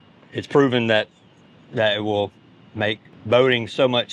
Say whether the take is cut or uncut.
cut